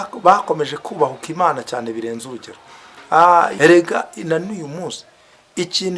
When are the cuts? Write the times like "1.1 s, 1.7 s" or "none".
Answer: 3.5 s